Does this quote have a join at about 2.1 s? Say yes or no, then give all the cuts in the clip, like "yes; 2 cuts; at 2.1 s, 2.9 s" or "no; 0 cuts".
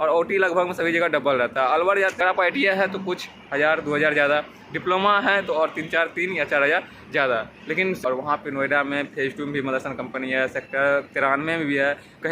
yes; 2 cuts; at 2.1 s, 8.0 s